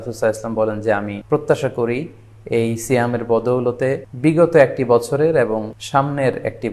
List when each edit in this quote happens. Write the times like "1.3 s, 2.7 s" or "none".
1.2 s, 4.1 s, 5.8 s